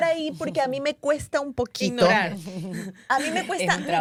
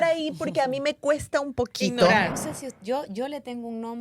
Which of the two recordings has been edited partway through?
second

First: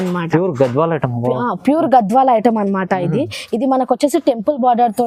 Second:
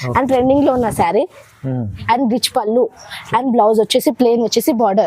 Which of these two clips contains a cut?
second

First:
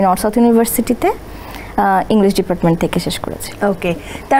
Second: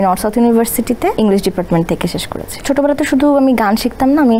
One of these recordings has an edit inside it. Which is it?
second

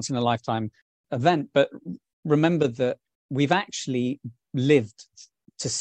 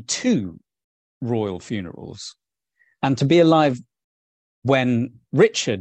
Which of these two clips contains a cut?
first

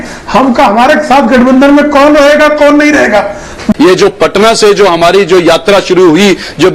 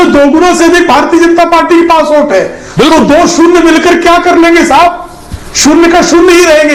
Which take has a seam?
first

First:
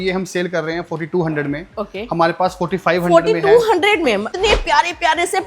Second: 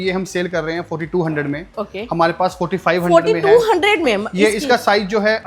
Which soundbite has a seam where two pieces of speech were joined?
first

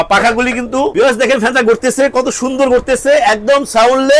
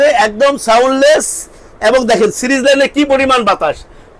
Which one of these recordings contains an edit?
first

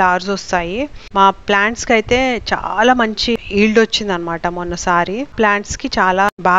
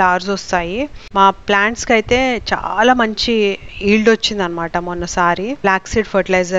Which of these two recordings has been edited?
first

